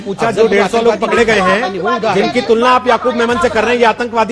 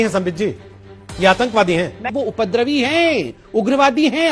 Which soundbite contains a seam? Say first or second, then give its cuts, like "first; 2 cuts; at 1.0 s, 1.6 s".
second; 1 cut; at 2.0 s